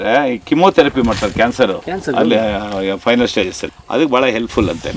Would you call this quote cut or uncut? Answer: cut